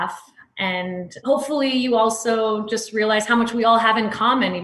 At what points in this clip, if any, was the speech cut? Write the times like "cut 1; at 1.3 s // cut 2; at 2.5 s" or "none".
cut 1; at 1.1 s

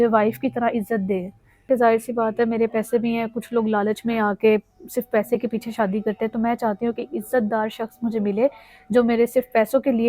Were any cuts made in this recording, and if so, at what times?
cut 1; at 1.6 s

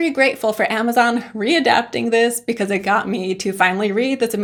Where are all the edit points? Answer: none

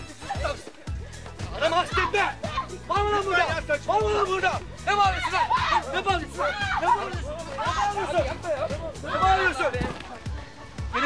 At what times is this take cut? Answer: cut 1; at 9.5 s

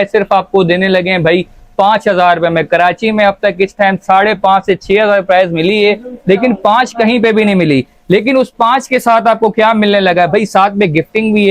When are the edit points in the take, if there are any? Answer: none

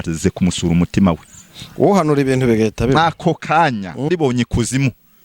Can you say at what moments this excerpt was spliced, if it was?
cut 1; at 4.1 s

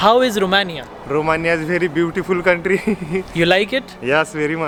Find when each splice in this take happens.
none

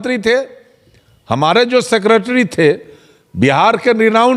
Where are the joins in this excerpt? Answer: none

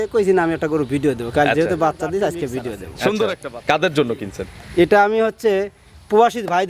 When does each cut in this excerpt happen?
cut 1; at 3.5 s

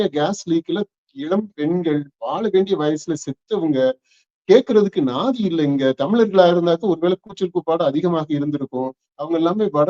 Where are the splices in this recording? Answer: none

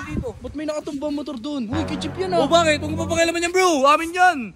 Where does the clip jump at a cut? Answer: none

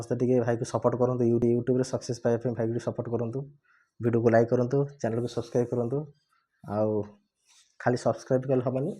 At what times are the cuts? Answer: cut 1; at 1.4 s

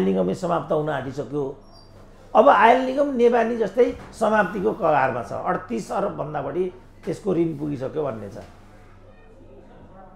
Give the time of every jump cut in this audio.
none

